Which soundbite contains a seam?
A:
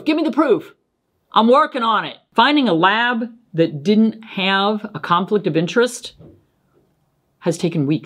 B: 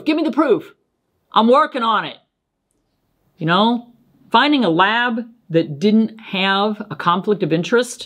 A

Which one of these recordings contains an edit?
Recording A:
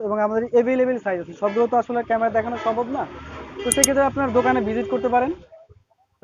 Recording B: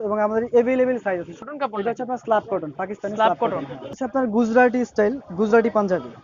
B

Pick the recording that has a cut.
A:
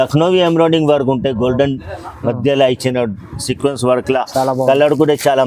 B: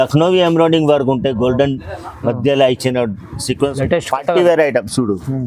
B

